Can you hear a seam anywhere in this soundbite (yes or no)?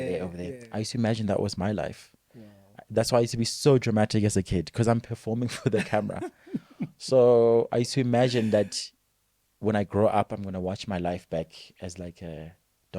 no